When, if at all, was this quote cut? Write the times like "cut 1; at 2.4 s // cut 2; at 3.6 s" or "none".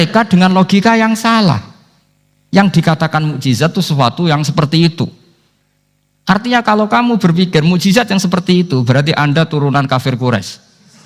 none